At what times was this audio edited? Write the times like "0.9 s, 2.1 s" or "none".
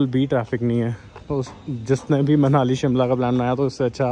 none